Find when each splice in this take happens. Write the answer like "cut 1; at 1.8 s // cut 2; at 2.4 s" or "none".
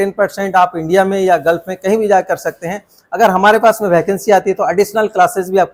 none